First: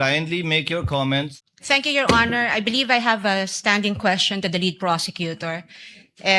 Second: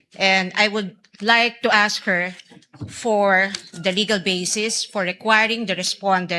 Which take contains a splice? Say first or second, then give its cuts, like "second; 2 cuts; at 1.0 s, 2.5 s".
first; 1 cut; at 1.5 s